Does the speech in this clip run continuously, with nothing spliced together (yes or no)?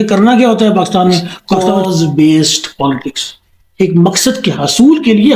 no